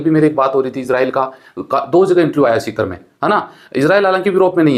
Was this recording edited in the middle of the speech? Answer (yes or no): no